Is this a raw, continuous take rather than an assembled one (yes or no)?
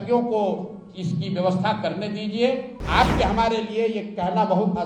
no